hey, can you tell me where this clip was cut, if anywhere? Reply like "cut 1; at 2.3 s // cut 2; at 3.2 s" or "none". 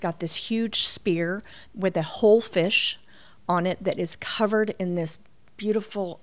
none